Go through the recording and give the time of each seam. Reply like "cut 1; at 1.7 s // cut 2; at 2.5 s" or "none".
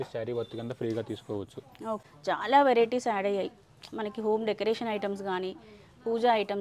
cut 1; at 2.0 s